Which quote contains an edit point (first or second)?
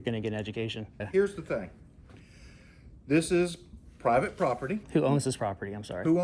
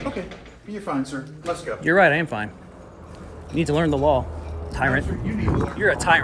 first